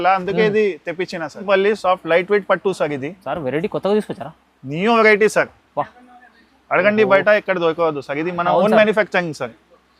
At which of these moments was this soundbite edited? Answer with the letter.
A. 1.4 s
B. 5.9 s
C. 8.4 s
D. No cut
A